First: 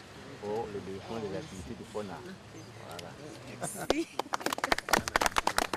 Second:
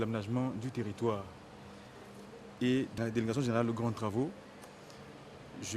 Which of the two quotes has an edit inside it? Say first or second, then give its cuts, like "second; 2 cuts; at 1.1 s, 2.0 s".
second; 1 cut; at 3.0 s